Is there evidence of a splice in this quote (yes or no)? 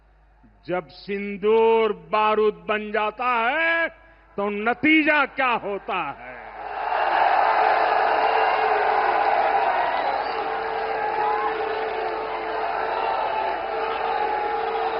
no